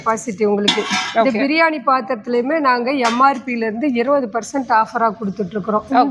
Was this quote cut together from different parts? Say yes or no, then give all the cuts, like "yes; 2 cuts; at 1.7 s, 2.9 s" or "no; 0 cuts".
no; 0 cuts